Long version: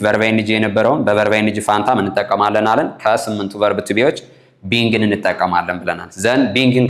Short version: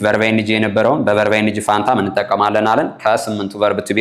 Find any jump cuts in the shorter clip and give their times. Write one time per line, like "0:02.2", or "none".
none